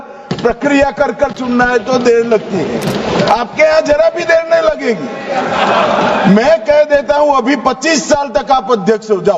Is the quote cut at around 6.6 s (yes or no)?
no